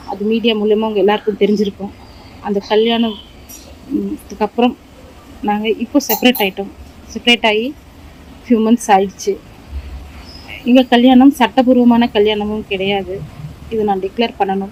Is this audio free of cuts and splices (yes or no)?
yes